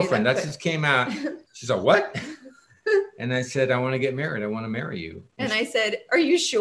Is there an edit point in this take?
no; 0 cuts

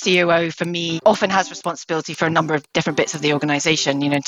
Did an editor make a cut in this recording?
yes; 1 cut; at 0.9 s

